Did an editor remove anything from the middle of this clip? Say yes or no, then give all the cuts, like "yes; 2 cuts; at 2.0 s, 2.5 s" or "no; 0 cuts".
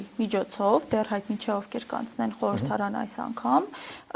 no; 0 cuts